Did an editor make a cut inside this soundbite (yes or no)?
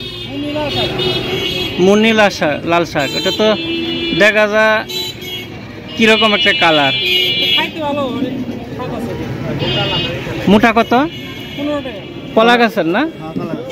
yes